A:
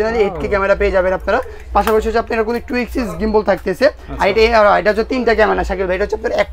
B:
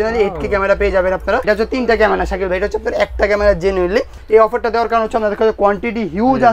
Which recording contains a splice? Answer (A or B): B